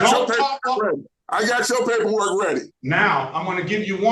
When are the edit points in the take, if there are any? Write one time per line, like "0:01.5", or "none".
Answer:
0:01.2
0:02.7